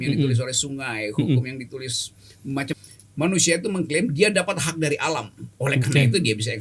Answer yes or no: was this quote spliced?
yes